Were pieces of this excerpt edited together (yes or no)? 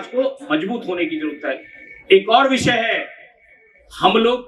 no